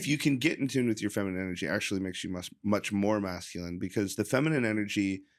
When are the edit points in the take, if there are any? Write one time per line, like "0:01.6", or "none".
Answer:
none